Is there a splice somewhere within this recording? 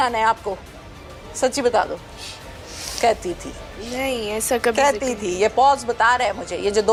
no; 0 cuts

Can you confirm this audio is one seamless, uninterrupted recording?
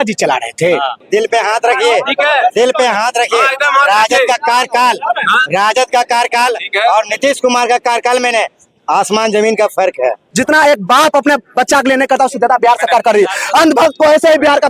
no; 2 cuts; at 1.0 s, 10.2 s

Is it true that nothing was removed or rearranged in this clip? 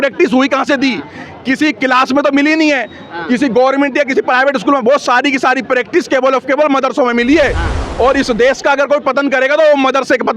yes; 0 cuts

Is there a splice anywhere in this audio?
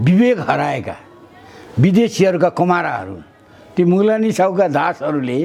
no; 0 cuts

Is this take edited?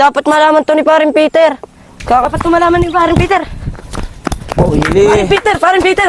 yes; 2 cuts; at 2.2 s, 4.8 s

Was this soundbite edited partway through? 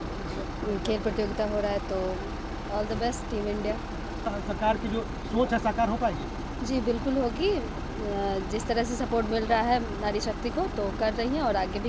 yes; 1 cut; at 4.2 s

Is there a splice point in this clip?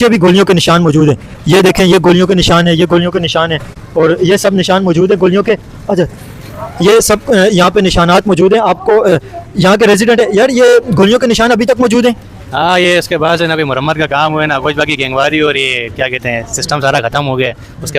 no; 0 cuts

